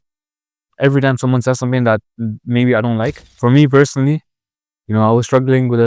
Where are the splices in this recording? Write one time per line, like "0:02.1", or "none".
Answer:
0:03.2